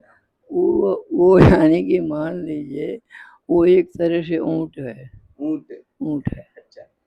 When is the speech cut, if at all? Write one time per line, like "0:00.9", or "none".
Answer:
none